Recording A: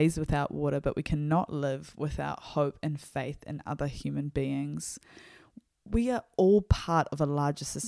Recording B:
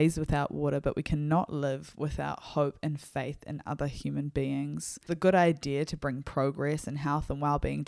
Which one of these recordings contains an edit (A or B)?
B